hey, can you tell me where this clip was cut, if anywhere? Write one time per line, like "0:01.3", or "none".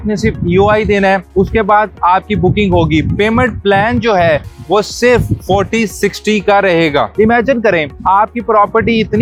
none